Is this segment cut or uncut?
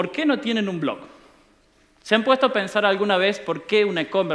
cut